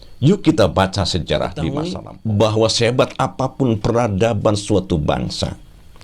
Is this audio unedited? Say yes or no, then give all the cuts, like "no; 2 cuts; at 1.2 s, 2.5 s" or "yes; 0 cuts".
no; 1 cut; at 2.0 s